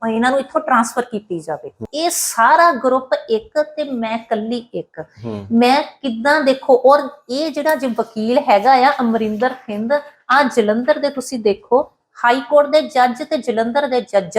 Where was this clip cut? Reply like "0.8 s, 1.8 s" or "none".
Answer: 1.9 s